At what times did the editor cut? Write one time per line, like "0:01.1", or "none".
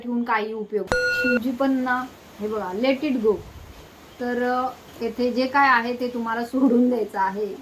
0:00.9